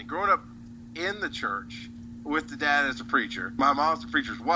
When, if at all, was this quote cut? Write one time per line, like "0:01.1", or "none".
0:03.6